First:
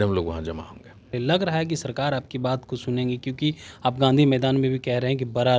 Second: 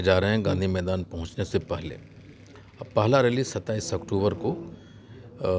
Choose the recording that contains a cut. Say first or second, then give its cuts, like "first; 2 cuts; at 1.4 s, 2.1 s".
first; 1 cut; at 1.1 s